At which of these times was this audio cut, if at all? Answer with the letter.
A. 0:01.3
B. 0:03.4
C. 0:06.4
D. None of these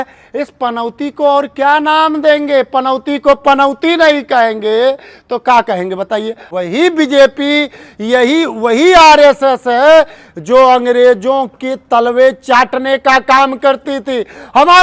C